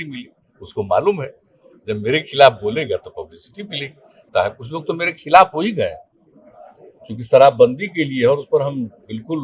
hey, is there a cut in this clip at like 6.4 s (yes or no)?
no